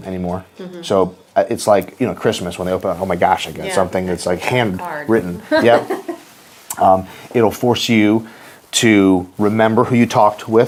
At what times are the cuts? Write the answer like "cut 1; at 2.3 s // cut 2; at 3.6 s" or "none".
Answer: none

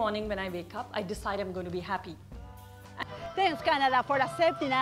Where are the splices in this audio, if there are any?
cut 1; at 3.0 s

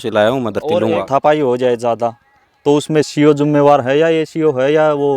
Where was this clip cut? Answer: cut 1; at 1.0 s

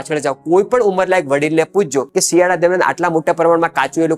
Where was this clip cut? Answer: cut 1; at 2.1 s

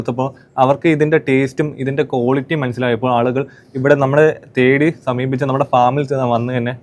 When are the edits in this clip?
none

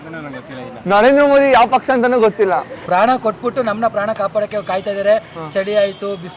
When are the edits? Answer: cut 1; at 2.8 s

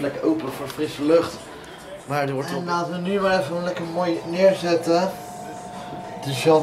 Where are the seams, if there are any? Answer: cut 1; at 2.6 s

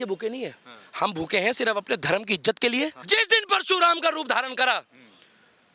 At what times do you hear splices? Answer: cut 1; at 3.0 s

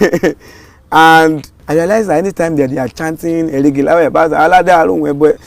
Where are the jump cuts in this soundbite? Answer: cut 1; at 1.5 s

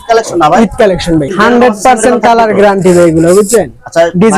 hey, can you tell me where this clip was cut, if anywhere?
cut 1; at 1.3 s

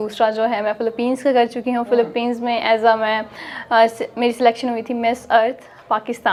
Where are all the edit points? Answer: none

